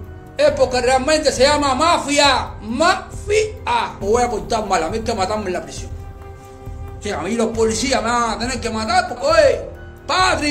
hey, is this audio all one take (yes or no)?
no